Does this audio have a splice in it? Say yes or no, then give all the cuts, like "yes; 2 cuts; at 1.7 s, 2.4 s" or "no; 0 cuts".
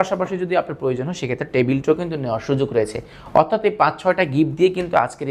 no; 0 cuts